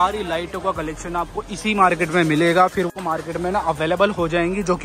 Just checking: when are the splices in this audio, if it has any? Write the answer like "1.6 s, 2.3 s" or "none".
2.9 s

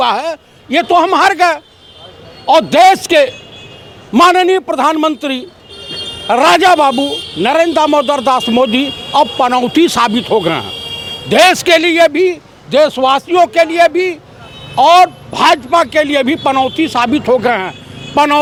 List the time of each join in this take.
none

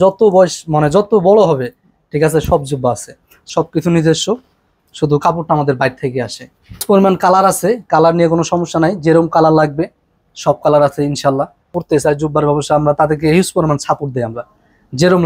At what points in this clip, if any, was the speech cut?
3.4 s, 6.8 s, 11.8 s

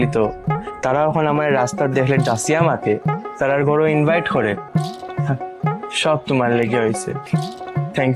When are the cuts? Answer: none

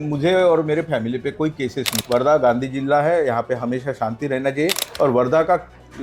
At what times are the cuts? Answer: 1.9 s, 4.9 s

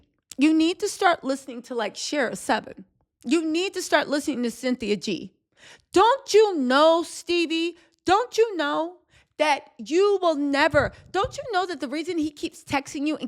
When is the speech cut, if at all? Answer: none

